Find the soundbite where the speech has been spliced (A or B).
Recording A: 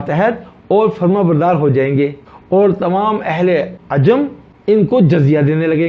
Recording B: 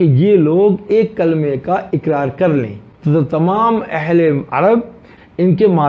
A